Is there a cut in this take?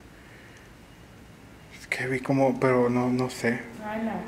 no; 0 cuts

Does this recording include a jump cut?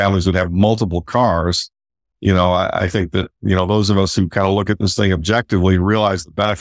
yes; 1 cut; at 3.4 s

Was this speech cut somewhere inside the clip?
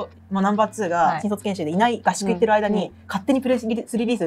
yes; 1 cut; at 1.2 s

